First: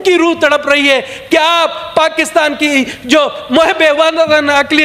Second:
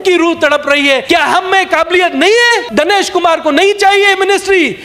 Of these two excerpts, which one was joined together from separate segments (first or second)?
second